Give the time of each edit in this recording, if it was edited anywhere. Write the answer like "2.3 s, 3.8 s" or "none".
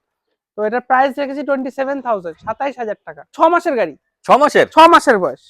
3.3 s